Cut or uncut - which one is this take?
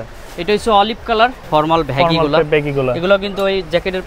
cut